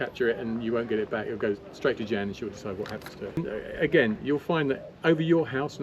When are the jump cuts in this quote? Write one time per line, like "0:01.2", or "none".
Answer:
0:03.4